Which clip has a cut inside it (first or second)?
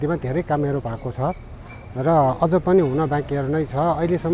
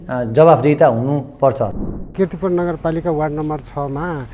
second